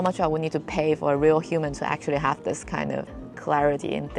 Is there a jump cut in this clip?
yes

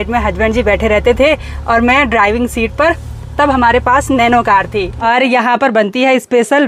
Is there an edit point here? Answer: yes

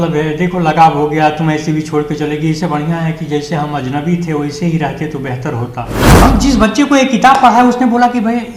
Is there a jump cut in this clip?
yes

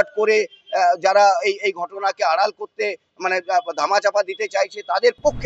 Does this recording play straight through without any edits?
yes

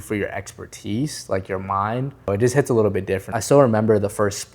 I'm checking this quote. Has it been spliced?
yes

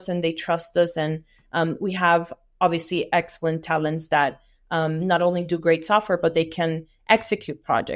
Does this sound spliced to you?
no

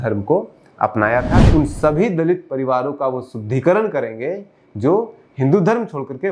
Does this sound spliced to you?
yes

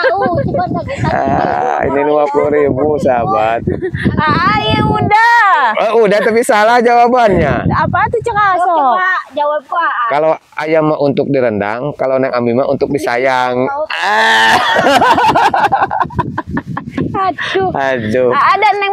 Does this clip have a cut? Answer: no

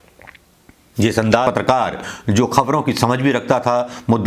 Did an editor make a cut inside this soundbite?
yes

